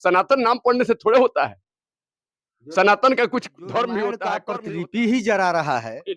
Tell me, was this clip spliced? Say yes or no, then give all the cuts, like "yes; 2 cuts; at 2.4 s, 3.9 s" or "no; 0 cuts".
yes; 1 cut; at 4.5 s